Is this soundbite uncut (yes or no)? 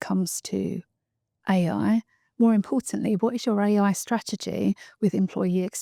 yes